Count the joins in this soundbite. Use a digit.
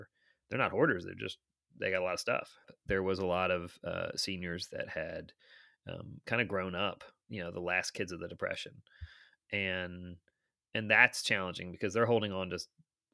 1